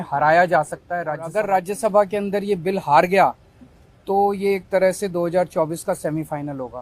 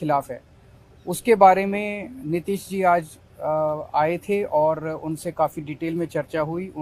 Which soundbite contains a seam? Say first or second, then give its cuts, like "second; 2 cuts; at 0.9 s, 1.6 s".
first; 1 cut; at 1.2 s